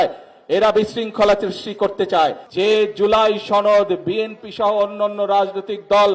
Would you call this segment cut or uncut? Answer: cut